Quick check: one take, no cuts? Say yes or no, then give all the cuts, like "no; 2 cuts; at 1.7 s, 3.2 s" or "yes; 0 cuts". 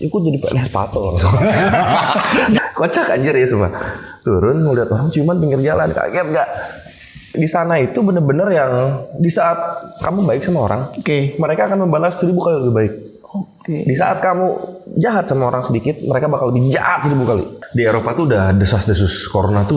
no; 3 cuts; at 2.6 s, 7.3 s, 17.6 s